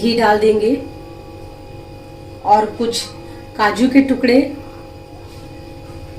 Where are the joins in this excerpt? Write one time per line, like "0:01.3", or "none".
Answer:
0:01.8
0:05.3